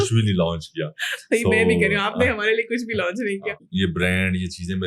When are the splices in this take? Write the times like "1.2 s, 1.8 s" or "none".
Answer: 3.7 s

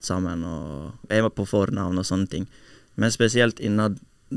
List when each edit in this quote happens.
1.1 s

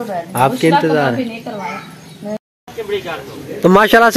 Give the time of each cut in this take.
2.4 s

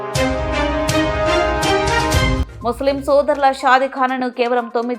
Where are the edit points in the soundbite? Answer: 2.4 s

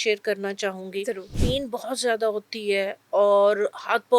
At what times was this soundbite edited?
1.3 s

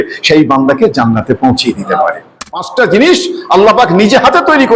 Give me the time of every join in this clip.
2.7 s

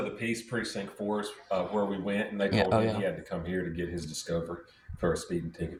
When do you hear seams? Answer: none

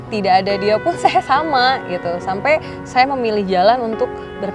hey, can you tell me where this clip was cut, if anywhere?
none

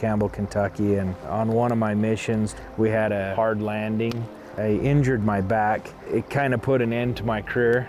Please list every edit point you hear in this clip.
1.2 s, 2.5 s, 3.3 s, 6.0 s

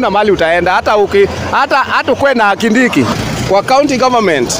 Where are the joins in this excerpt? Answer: 3.1 s

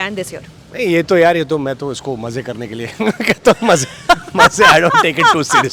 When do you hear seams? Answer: none

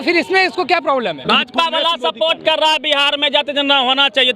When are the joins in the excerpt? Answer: 1.2 s

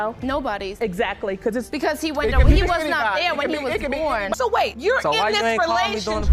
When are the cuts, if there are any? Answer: 4.4 s

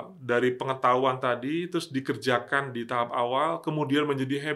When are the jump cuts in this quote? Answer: none

